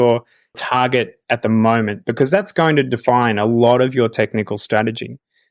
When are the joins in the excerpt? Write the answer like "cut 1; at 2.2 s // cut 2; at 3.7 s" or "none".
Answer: none